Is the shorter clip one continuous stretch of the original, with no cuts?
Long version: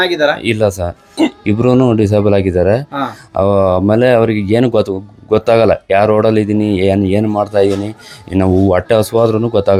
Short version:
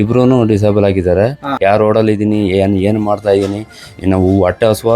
no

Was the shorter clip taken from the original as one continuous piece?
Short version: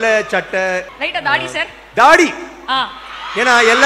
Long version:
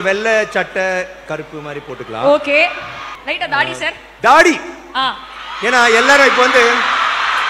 no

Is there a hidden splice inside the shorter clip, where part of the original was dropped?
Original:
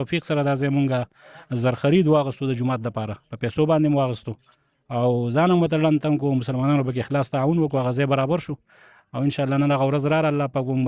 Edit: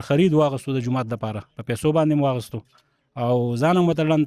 no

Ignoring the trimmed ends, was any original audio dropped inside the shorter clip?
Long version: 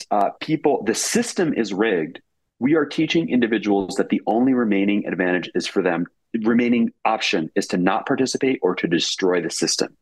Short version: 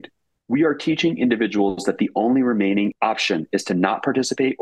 yes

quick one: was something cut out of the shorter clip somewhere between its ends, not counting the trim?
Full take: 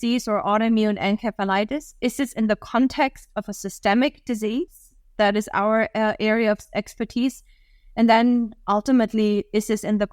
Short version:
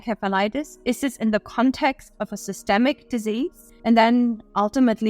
yes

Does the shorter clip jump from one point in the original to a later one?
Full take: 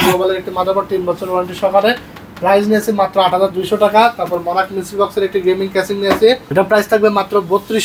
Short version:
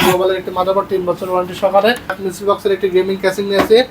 yes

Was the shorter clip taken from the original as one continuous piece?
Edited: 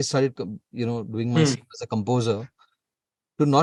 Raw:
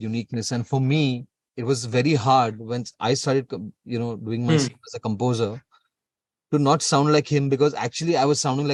yes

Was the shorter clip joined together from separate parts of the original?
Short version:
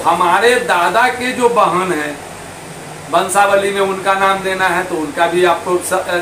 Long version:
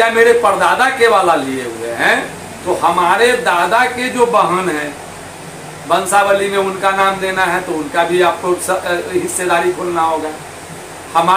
no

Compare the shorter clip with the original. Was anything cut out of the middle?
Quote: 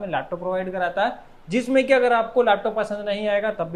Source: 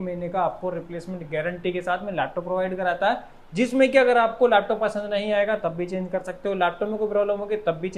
no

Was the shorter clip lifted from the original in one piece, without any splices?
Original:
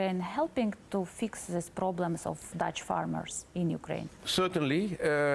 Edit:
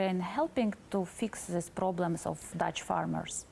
yes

